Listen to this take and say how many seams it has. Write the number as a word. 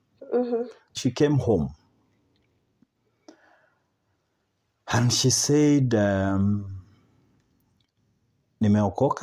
one